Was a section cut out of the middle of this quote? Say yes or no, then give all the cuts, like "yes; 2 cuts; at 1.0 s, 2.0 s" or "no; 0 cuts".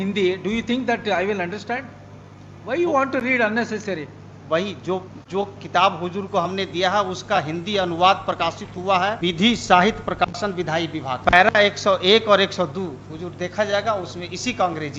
no; 0 cuts